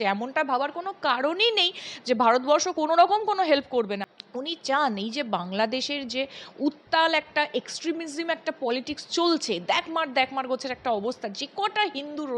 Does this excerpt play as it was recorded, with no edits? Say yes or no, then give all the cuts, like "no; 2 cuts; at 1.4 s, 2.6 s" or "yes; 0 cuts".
no; 1 cut; at 4.0 s